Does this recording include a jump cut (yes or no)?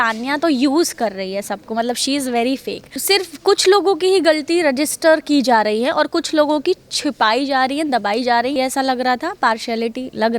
yes